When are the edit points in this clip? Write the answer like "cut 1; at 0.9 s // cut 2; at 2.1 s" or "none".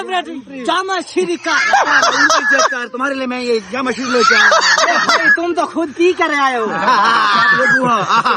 none